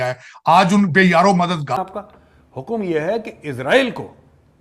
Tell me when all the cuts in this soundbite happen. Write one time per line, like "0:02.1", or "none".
0:01.8